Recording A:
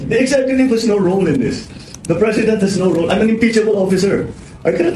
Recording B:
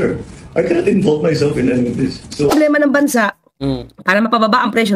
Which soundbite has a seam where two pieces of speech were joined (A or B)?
B